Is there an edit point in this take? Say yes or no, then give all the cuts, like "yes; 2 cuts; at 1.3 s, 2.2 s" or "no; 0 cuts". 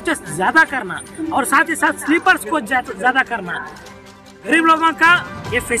yes; 1 cut; at 3.8 s